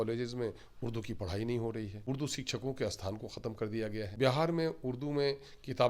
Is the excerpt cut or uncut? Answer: cut